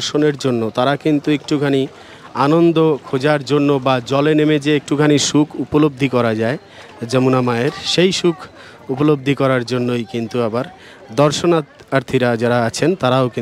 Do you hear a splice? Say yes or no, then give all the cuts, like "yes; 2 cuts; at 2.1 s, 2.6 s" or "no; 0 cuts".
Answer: no; 0 cuts